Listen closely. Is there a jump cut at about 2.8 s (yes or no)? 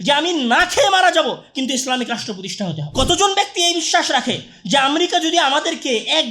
yes